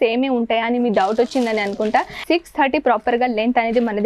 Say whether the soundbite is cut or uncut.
cut